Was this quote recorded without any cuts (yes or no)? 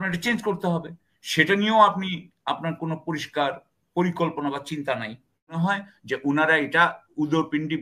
no